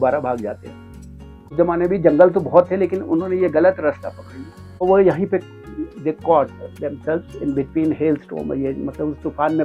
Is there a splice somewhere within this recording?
yes; 2 cuts; at 1.5 s, 4.8 s

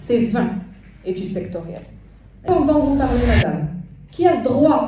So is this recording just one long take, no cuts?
no; 1 cut; at 2.4 s

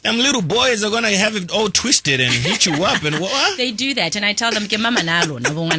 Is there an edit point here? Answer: no; 0 cuts

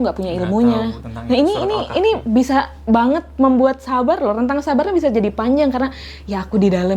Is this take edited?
no; 0 cuts

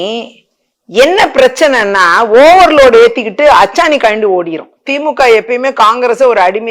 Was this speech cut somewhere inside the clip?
yes; 1 cut; at 4.9 s

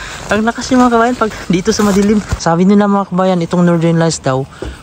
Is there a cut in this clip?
yes; 1 cut; at 2.3 s

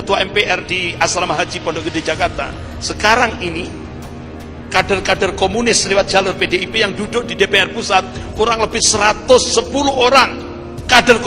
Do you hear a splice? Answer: no; 0 cuts

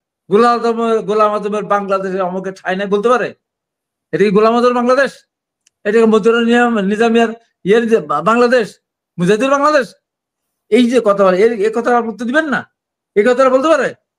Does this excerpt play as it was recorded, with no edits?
yes; 0 cuts

